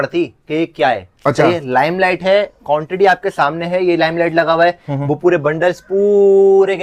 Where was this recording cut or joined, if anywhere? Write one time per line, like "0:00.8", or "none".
none